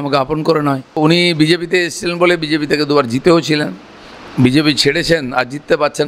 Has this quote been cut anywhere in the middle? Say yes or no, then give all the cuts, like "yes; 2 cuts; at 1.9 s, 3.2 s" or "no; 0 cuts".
yes; 1 cut; at 1.0 s